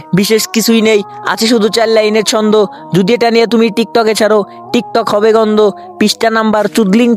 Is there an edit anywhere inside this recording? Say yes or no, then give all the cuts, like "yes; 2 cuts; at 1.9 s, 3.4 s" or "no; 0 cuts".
no; 0 cuts